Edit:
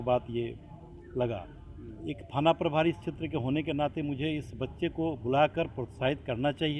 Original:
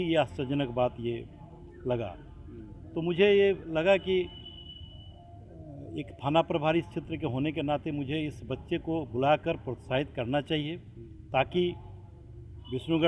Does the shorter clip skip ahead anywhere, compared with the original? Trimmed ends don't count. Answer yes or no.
yes